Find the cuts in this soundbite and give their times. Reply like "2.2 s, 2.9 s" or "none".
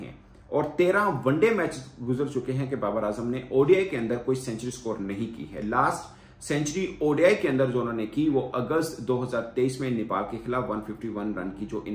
none